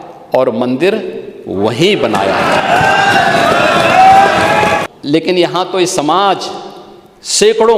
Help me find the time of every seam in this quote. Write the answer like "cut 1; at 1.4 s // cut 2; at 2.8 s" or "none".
cut 1; at 4.8 s

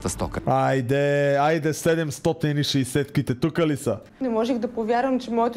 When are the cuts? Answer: cut 1; at 4.1 s

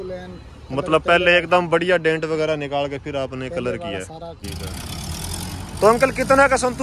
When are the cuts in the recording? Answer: cut 1; at 4.4 s

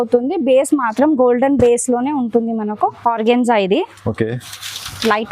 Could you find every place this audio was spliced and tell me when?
cut 1; at 3.0 s

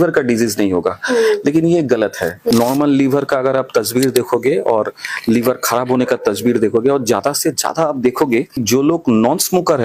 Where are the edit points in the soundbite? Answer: cut 1; at 2.4 s // cut 2; at 8.6 s

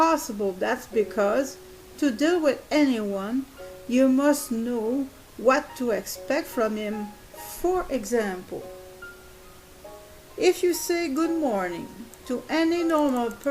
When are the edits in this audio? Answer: cut 1; at 4.4 s

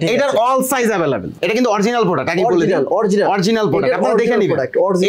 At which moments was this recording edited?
cut 1; at 1.3 s

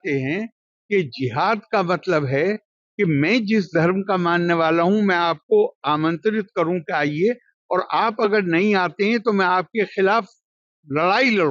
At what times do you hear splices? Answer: none

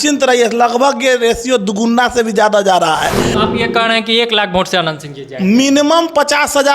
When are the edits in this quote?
cut 1; at 3.3 s

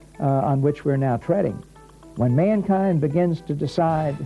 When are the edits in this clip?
cut 1; at 1.9 s

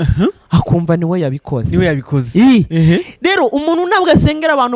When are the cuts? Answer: none

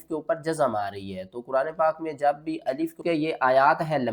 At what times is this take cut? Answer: cut 1; at 3.0 s

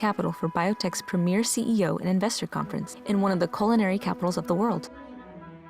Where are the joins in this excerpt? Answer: cut 1; at 4.8 s

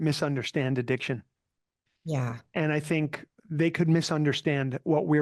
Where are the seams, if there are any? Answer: cut 1; at 3.3 s

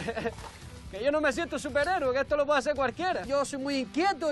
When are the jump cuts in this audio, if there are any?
cut 1; at 3.2 s

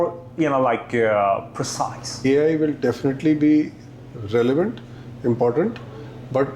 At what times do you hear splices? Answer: cut 1; at 2.1 s

